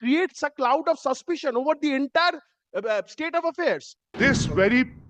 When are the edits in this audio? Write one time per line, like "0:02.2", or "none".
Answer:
0:04.1